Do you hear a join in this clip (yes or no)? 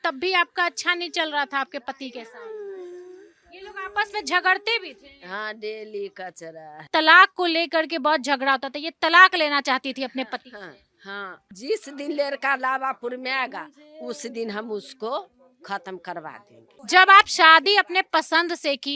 yes